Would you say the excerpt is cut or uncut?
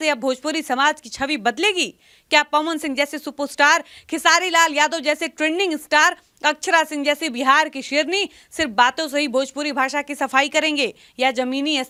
uncut